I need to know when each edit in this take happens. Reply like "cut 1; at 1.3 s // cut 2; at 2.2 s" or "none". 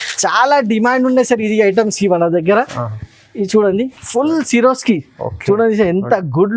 none